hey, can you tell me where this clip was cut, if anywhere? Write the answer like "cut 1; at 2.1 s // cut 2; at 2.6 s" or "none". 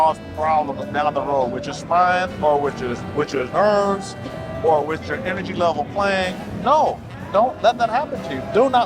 cut 1; at 2.3 s // cut 2; at 6.5 s